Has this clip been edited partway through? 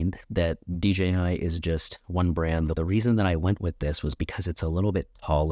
no; 0 cuts

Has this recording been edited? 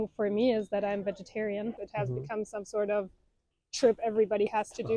yes; 1 cut; at 1.8 s

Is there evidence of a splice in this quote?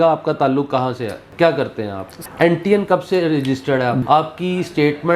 yes; 3 cuts; at 1.3 s, 2.1 s, 4.0 s

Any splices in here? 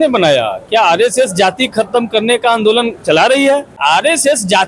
yes; 1 cut; at 3.8 s

